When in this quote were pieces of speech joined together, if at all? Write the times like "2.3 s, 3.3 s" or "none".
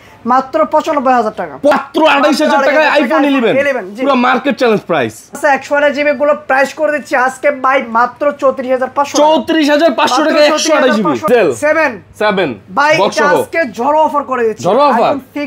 1.7 s, 5.4 s, 11.2 s

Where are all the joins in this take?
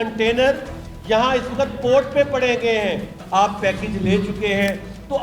3.1 s

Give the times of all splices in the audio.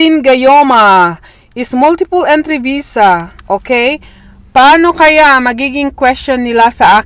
none

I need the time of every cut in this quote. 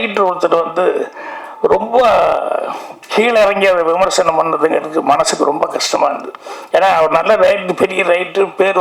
none

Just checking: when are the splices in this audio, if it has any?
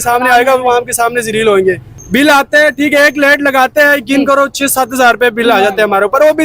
1.9 s

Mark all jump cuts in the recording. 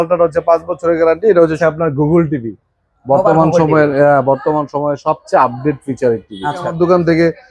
1.6 s, 6.7 s

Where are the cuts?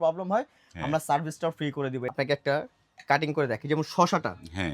2.1 s

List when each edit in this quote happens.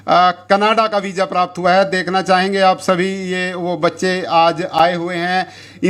none

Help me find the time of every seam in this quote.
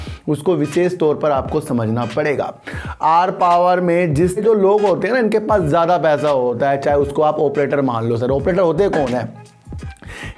4.4 s

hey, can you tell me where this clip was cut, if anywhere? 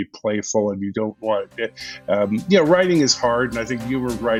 none

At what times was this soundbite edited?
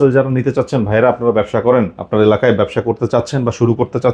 none

